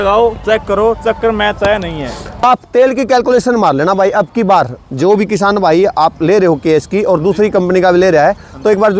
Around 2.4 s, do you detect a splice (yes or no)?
yes